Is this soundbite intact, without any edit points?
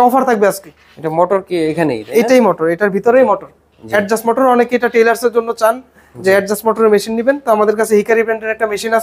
yes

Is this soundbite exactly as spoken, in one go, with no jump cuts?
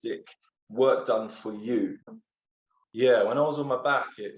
no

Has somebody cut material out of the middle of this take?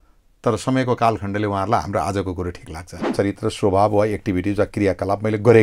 yes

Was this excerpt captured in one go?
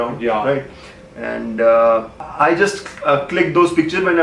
no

